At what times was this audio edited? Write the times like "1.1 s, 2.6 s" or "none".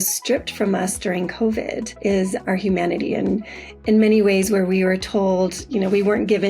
2.4 s